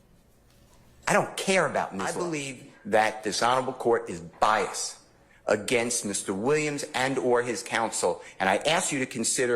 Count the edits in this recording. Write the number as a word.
one